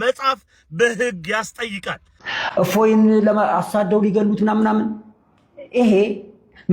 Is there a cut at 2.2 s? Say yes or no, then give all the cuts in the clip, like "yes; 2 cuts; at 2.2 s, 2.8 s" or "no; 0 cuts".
yes; 1 cut; at 2.2 s